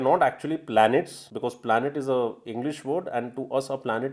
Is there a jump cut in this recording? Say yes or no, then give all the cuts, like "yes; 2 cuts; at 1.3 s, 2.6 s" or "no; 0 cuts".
yes; 1 cut; at 1.2 s